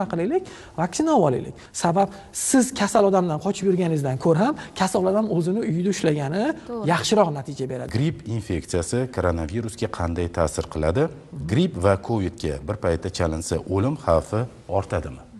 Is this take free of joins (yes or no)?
no